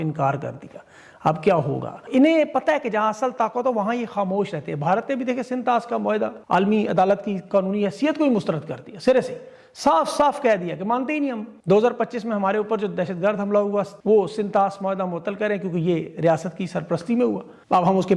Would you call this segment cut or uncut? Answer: uncut